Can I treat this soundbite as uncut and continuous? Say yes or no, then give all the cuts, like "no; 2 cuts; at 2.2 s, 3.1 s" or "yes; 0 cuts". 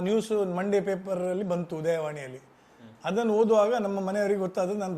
yes; 0 cuts